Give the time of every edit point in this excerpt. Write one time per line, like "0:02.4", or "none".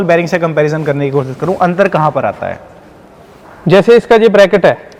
none